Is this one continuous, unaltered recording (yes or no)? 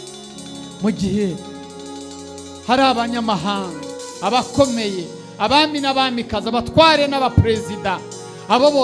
yes